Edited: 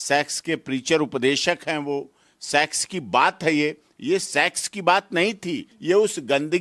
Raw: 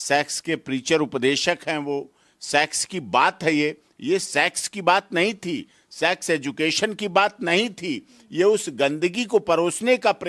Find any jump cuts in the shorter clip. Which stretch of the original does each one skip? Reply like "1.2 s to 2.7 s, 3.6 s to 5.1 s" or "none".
5.7 s to 8.2 s

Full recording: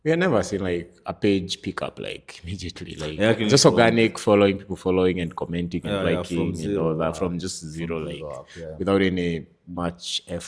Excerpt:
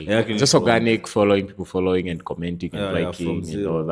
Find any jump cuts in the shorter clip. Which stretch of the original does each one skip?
none

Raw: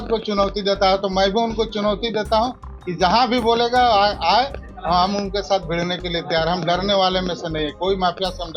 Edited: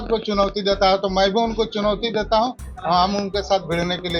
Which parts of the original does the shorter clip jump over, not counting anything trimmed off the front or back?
2.7 s to 4.7 s

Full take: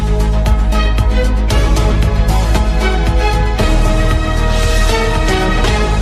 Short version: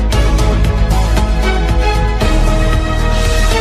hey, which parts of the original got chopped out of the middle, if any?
none

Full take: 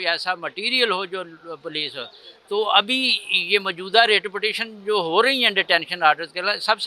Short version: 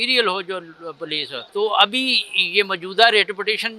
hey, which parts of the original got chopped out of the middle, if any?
2.0 s to 2.3 s

